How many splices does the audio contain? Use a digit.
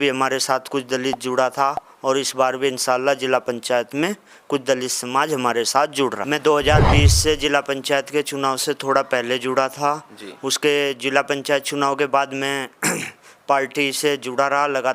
1